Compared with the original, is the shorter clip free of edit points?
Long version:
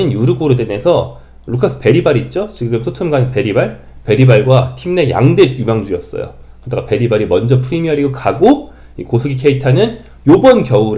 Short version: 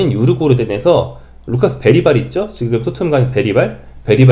yes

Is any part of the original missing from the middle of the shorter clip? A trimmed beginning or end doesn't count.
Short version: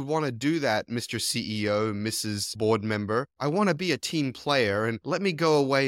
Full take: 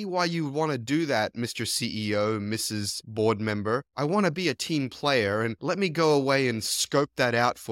yes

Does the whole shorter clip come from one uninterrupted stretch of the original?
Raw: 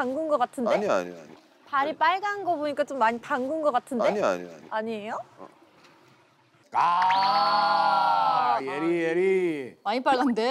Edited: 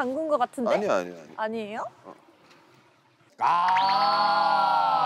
no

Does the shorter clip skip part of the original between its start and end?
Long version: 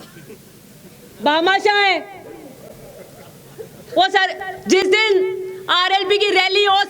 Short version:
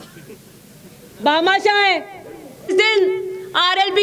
yes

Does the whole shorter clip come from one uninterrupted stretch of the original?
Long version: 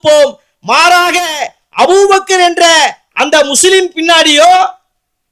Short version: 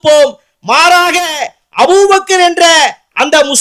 yes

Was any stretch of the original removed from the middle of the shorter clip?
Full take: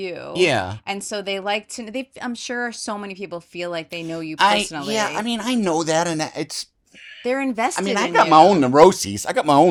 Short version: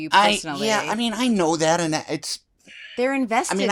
no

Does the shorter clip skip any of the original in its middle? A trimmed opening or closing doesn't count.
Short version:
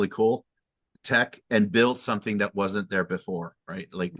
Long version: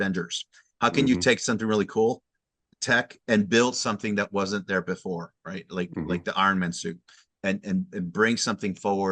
no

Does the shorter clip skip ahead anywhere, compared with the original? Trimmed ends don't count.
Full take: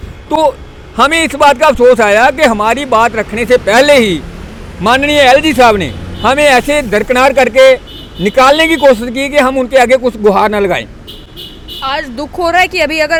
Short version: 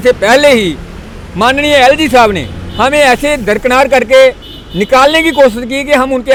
no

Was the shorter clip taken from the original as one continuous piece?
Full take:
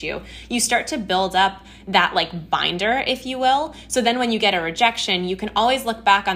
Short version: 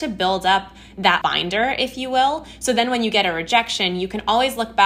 no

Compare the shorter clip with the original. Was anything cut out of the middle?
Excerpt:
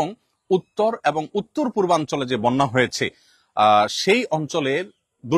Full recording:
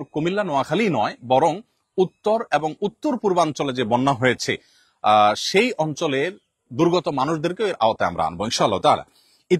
no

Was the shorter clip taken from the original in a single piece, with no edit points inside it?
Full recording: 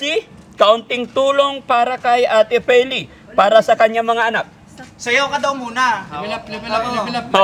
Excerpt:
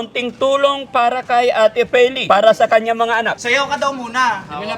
no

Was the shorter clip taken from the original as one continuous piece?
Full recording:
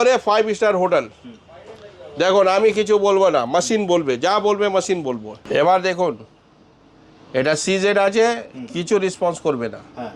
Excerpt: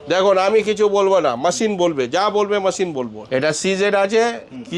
no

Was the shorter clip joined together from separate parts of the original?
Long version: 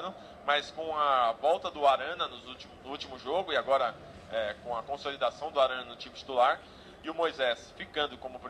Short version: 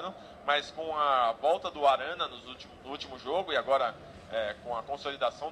no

